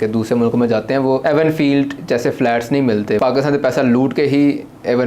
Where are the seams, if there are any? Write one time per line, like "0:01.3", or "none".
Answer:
0:01.2
0:03.2